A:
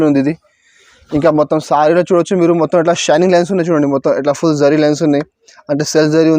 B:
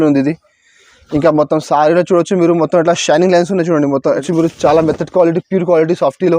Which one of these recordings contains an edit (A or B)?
B